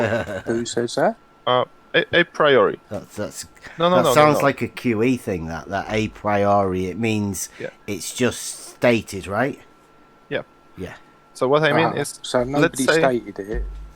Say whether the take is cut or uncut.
cut